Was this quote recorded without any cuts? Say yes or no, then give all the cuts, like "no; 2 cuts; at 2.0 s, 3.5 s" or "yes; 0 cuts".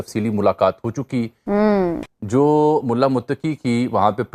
no; 1 cut; at 1.7 s